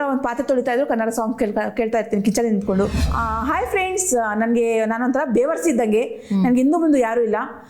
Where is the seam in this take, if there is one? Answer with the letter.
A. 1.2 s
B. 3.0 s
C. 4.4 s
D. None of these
B